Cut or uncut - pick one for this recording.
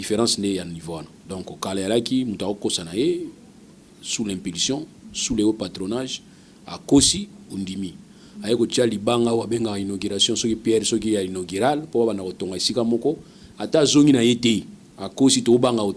uncut